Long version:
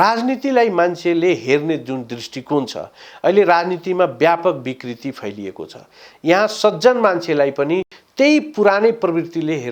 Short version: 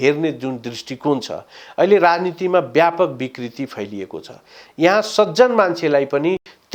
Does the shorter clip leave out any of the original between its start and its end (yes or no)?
no